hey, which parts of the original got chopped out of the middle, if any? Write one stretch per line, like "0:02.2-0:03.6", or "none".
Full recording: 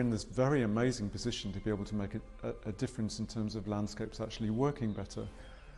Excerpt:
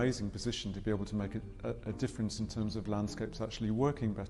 none